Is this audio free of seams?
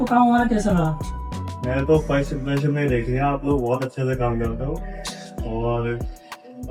yes; 0 cuts

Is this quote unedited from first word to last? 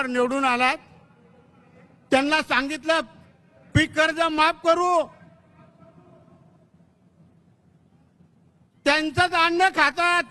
yes; 0 cuts

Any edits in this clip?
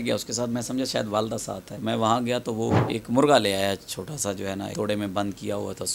yes; 3 cuts; at 1.7 s, 2.8 s, 4.7 s

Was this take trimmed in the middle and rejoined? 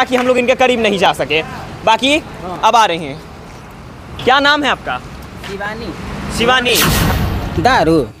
yes; 1 cut; at 7.1 s

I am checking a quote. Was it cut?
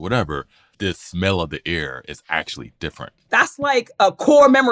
no; 0 cuts

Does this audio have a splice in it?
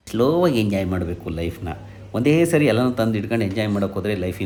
no; 0 cuts

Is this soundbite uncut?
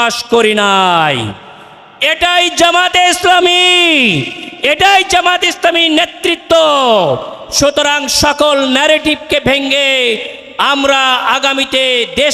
yes; 0 cuts

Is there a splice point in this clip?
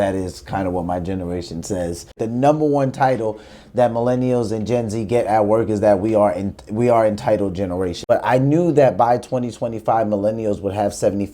yes; 2 cuts; at 2.2 s, 8.0 s

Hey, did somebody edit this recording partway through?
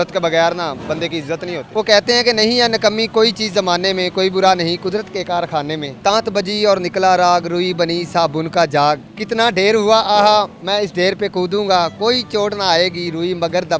yes; 3 cuts; at 1.7 s, 6.0 s, 9.0 s

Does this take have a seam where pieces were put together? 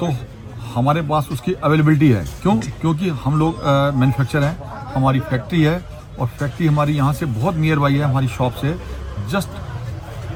no; 0 cuts

